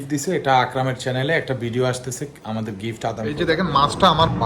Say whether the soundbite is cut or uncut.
cut